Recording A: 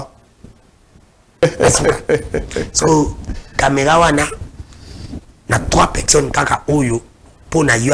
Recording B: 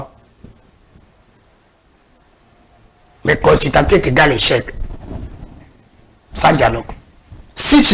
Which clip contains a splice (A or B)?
A